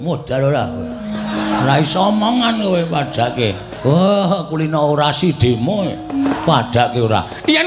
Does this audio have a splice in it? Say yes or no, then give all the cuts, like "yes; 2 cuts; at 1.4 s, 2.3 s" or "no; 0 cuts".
yes; 2 cuts; at 1.5 s, 6.3 s